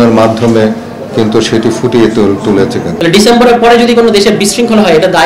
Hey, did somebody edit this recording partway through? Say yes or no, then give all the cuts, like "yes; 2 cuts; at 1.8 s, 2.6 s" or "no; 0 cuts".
yes; 1 cut; at 2.9 s